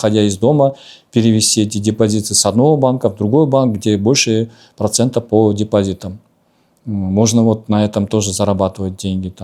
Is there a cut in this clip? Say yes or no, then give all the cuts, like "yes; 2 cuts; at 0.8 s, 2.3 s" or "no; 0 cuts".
no; 0 cuts